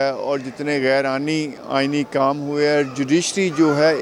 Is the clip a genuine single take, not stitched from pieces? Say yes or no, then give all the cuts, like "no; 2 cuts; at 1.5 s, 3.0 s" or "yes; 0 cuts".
yes; 0 cuts